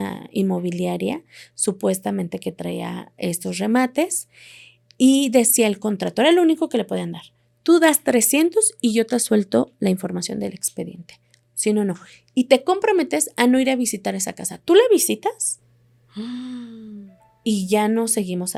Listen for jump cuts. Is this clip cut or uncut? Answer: uncut